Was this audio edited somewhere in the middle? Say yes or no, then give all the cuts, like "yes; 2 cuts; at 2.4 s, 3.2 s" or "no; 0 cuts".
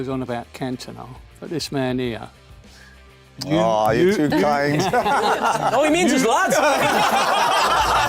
no; 0 cuts